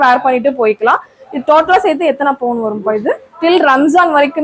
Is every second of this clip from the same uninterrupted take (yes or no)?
no